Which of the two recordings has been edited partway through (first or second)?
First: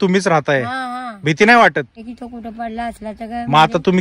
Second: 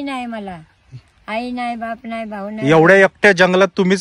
first